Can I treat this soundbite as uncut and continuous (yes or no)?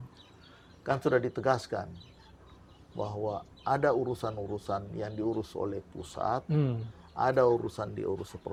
yes